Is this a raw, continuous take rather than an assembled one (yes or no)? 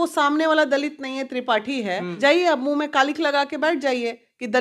no